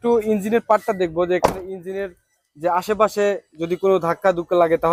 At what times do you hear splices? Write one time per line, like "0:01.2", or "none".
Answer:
none